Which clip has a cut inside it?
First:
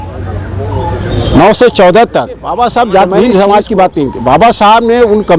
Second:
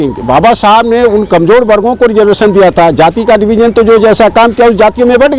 first; 1 cut; at 2.5 s

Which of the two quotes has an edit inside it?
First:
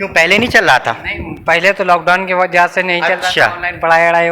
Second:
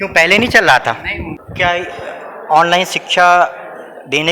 second; 1 cut; at 1.2 s

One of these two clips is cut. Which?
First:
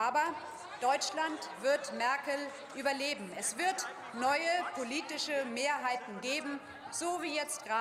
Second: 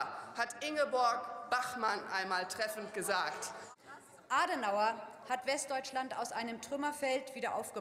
second; 1 cut; at 3.6 s

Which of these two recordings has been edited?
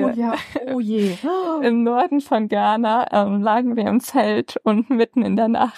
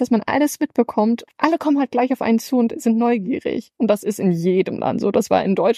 second; 1 cut; at 1.2 s

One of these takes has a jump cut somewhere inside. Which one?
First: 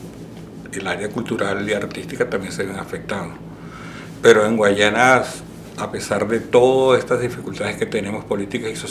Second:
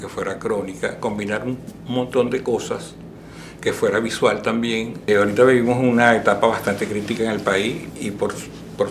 second; 1 cut; at 5.1 s

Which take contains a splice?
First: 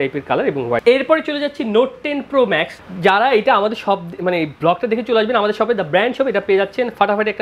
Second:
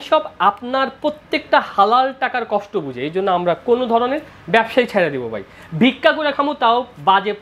first; 2 cuts; at 0.8 s, 2.8 s

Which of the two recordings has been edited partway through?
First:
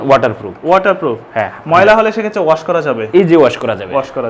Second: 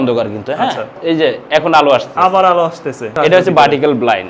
second; 2 cuts; at 1.0 s, 3.1 s

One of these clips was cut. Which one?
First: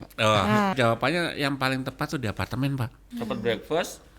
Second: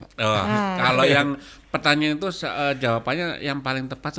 first; 2 cuts; at 0.7 s, 3.0 s

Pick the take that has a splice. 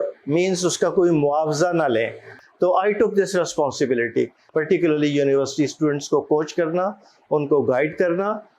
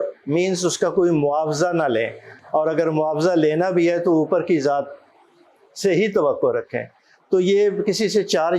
first; 2 cuts; at 2.3 s, 4.4 s

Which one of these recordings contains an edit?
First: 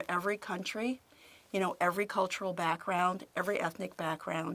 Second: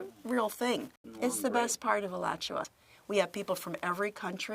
second; 2 cuts; at 1.0 s, 2.7 s

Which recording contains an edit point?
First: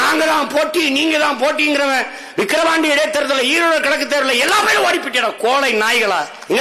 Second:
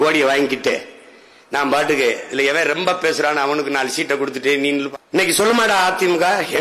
second; 1 cut; at 4.9 s

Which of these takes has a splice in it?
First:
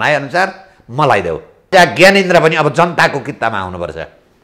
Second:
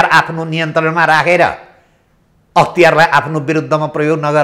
first; 1 cut; at 1.7 s

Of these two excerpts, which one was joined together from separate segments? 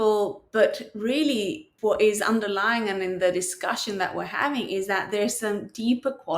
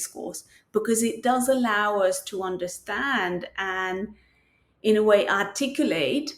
first; 1 cut; at 1.6 s

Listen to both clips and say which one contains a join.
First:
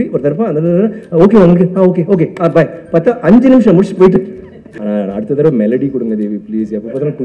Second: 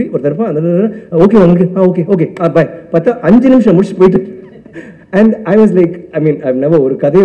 first; 1 cut; at 4.7 s

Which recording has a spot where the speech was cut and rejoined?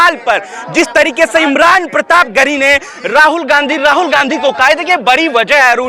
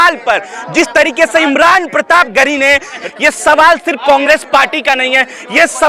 second; 1 cut; at 3.0 s

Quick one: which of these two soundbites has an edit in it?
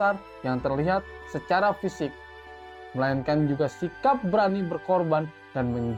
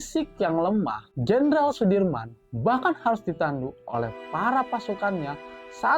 second; 1 cut; at 1.1 s

